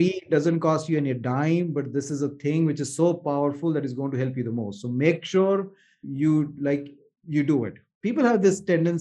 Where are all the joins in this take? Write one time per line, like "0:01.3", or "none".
0:06.0
0:07.8